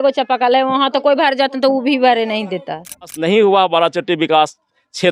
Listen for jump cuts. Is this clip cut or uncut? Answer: cut